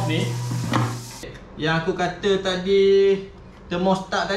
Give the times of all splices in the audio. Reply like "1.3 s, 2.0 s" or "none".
1.4 s